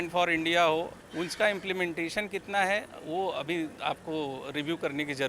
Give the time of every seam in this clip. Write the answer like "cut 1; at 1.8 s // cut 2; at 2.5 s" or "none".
cut 1; at 1.0 s

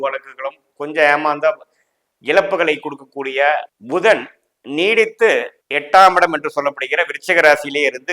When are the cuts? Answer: cut 1; at 3.7 s

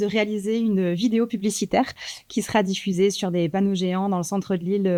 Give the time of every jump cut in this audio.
none

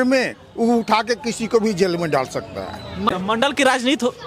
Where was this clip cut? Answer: cut 1; at 3.2 s

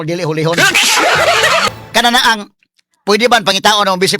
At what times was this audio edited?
cut 1; at 1.7 s

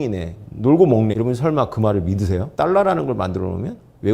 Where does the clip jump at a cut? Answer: cut 1; at 1.1 s // cut 2; at 2.5 s

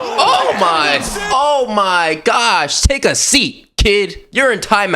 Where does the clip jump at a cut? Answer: none

